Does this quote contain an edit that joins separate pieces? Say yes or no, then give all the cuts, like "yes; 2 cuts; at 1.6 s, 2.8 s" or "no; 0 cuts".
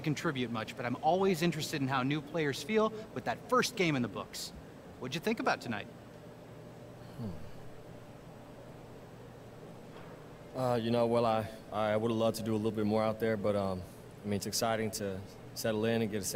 no; 0 cuts